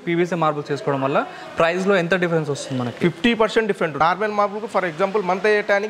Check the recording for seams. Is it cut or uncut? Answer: cut